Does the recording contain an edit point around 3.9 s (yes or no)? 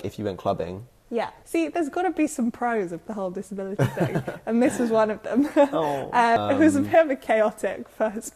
no